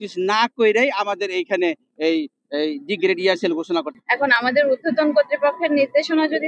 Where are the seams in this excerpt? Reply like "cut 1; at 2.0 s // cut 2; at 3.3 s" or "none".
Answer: cut 1; at 3.9 s